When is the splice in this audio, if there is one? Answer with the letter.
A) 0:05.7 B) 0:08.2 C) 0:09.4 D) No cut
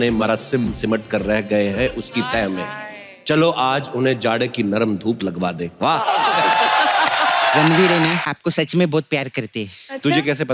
B